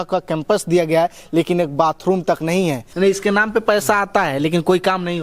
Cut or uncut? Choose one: cut